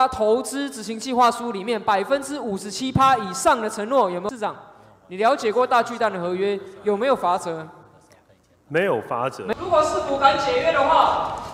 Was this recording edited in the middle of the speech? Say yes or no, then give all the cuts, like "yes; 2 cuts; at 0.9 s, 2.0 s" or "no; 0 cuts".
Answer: yes; 2 cuts; at 4.3 s, 9.5 s